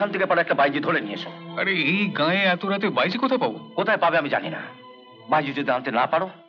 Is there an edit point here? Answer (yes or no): no